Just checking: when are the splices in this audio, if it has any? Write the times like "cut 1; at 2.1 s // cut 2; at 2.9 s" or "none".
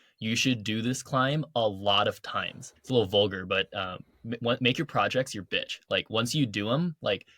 cut 1; at 2.6 s